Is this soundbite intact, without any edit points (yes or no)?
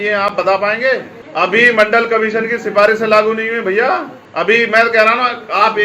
no